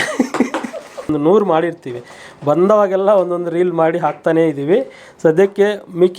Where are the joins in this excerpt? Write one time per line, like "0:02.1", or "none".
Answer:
0:01.1